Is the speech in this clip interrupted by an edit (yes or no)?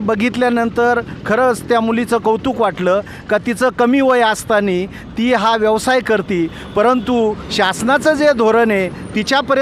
no